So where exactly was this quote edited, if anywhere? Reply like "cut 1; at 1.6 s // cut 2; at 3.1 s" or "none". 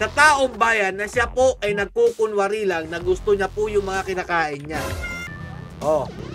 cut 1; at 5.2 s